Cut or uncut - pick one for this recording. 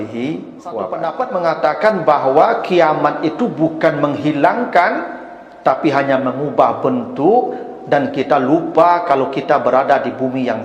cut